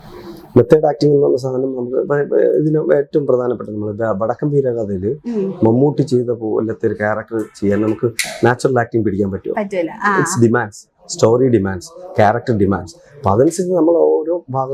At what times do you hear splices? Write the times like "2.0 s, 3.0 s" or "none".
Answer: none